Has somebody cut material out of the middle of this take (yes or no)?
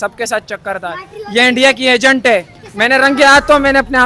yes